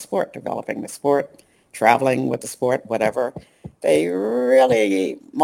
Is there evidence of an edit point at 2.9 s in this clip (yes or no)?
no